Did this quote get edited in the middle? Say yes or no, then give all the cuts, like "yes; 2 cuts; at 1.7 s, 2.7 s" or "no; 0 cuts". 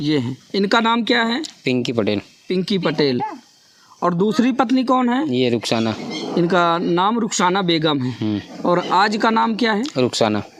no; 0 cuts